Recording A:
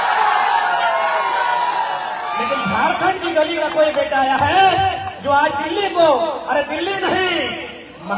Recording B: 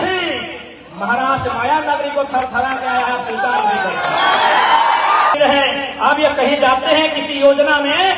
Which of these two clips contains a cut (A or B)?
B